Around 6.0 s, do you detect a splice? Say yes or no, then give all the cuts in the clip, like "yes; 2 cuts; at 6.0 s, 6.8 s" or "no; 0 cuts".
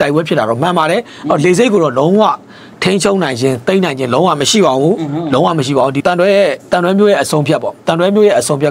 yes; 1 cut; at 6.0 s